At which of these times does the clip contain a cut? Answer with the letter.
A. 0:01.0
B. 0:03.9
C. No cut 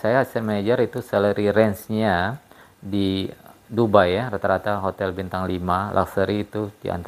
C